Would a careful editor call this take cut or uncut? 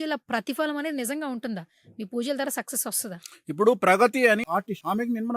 cut